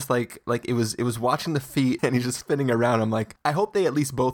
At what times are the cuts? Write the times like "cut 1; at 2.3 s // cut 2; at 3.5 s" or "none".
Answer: cut 1; at 2.0 s // cut 2; at 3.3 s